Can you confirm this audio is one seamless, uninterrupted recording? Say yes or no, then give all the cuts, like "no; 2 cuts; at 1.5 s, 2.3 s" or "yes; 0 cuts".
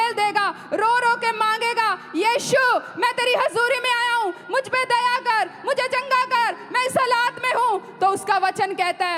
yes; 0 cuts